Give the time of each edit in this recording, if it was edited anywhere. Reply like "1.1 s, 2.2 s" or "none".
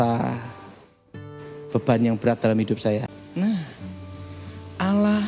3.2 s